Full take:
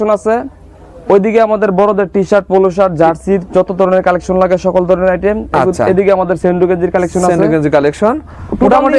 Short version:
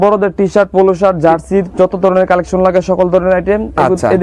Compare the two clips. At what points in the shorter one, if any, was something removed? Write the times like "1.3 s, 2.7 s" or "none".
none